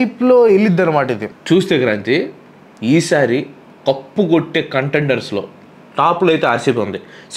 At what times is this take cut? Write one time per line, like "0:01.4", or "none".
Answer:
0:01.3